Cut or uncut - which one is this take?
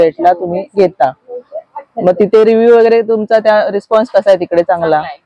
uncut